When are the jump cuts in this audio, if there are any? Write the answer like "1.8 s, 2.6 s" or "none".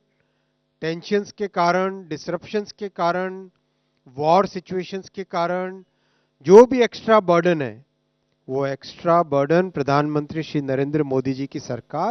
none